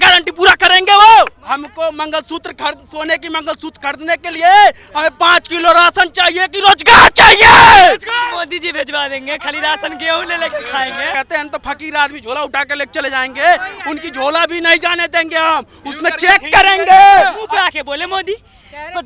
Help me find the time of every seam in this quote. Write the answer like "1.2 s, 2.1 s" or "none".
1.4 s, 8.1 s, 11.1 s, 17.4 s